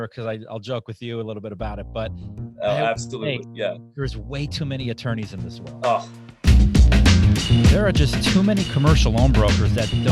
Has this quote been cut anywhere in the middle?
yes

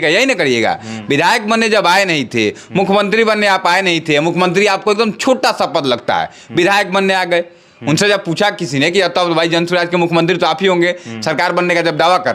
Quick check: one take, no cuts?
yes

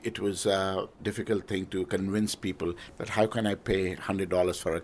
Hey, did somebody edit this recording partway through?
yes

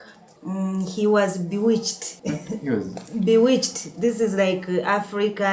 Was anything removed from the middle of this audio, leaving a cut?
no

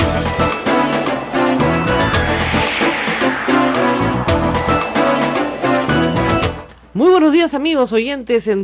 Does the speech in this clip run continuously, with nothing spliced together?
yes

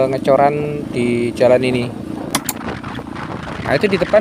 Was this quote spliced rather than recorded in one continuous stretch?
yes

